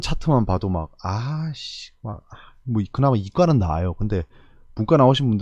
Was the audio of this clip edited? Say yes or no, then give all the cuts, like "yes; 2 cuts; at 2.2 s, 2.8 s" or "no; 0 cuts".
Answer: no; 0 cuts